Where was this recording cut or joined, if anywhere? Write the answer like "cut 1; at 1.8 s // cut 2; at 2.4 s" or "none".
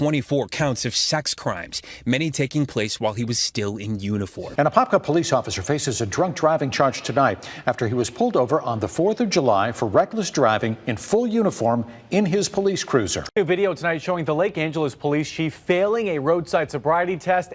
cut 1; at 4.4 s // cut 2; at 13.2 s